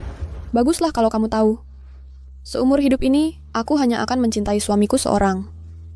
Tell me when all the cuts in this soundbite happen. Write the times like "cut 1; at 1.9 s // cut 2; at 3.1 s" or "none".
none